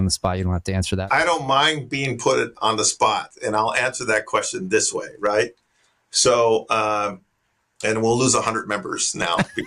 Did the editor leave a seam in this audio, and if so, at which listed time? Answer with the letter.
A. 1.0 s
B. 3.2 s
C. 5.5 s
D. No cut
A